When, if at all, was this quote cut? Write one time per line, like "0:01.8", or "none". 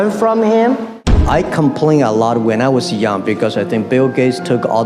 0:01.1